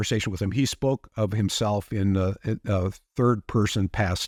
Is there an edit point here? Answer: no; 0 cuts

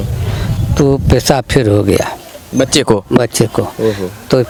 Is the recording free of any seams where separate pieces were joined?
yes; 0 cuts

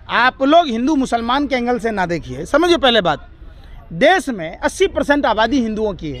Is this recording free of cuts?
yes; 0 cuts

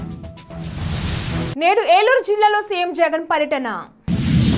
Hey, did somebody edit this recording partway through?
no; 0 cuts

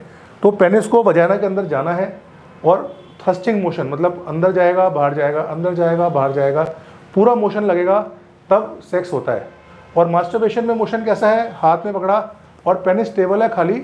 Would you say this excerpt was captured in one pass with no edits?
yes; 0 cuts

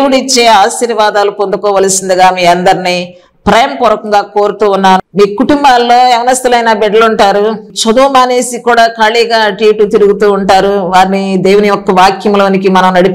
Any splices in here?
yes; 1 cut; at 5.0 s

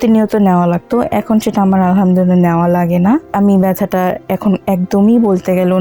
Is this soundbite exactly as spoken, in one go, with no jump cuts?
no; 1 cut; at 3.3 s

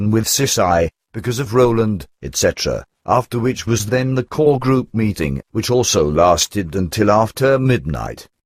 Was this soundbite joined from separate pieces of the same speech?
yes; 1 cut; at 4.1 s

